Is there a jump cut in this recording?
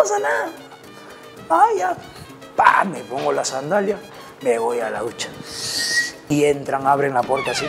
yes; 1 cut; at 6.3 s

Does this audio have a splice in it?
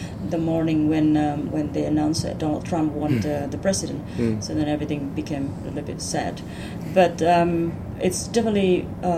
no; 0 cuts

